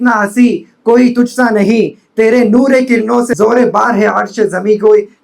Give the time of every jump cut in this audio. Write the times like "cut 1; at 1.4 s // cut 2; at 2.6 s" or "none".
cut 1; at 3.3 s